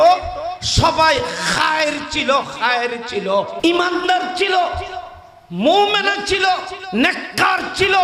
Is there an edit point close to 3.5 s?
yes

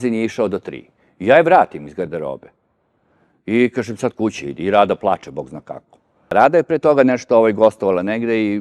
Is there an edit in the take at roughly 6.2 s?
yes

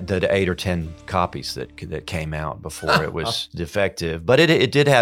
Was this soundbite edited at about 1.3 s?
no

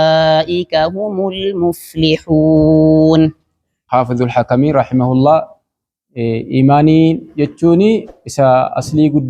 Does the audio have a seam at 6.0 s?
no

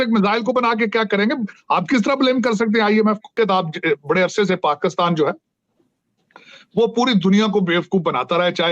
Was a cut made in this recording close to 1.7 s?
no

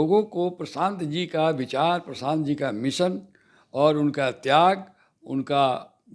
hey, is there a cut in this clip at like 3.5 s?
no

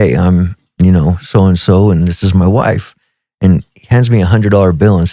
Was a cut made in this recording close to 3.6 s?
no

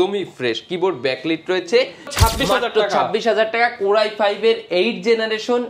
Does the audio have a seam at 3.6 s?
no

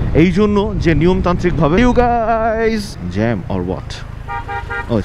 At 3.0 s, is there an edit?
yes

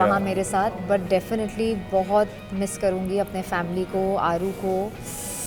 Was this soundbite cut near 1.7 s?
no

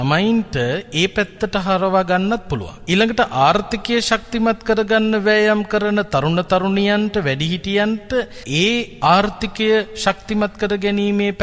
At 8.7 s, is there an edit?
yes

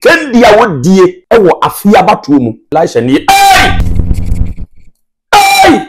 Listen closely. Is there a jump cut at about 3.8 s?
yes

